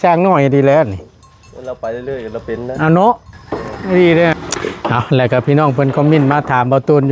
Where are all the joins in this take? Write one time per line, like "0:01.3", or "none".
0:04.3

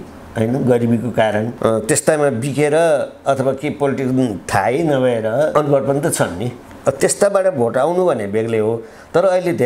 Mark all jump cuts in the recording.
0:01.5
0:05.5

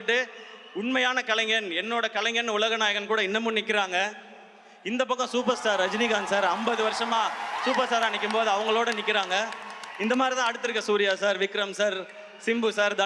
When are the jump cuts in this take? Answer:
none

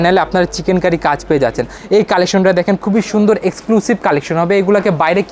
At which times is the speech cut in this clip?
0:01.7

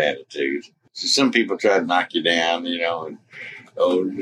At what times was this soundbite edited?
0:01.0

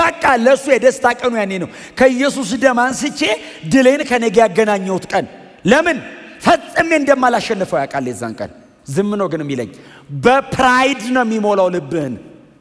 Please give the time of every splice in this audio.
none

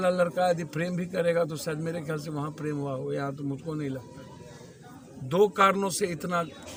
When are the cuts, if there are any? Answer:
none

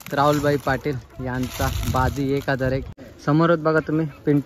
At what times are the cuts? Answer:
0:03.0

